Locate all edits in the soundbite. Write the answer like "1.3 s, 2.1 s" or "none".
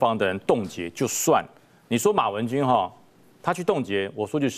none